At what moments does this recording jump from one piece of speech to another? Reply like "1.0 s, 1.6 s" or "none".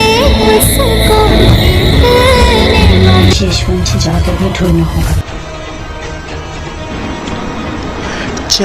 3.3 s